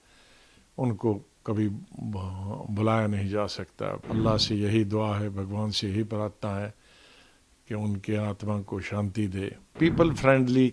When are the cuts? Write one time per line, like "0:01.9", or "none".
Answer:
0:04.0
0:09.7